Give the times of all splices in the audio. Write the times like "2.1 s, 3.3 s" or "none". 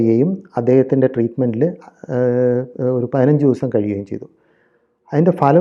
none